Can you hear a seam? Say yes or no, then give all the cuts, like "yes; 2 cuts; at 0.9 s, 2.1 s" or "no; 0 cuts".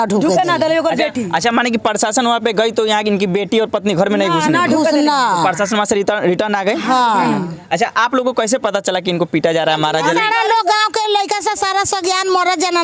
no; 0 cuts